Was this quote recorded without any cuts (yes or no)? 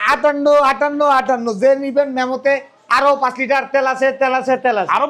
yes